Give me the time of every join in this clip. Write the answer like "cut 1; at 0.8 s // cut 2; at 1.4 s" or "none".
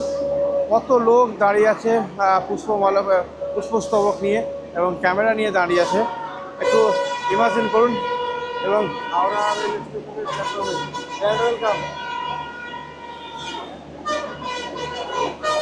none